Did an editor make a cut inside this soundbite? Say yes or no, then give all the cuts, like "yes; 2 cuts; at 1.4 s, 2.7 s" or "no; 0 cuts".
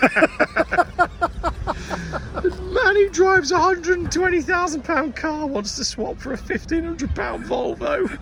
no; 0 cuts